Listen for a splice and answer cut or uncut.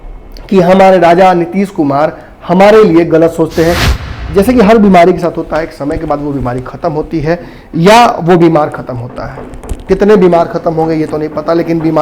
cut